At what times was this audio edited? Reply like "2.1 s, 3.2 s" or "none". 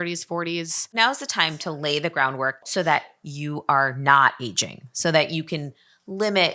0.9 s, 2.6 s